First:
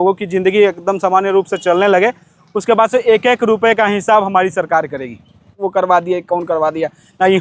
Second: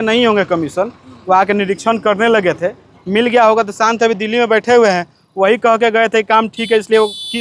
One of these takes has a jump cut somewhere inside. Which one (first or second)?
first